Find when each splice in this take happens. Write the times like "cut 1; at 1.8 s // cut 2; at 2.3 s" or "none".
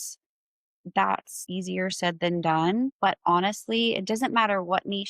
cut 1; at 1.3 s // cut 2; at 2.9 s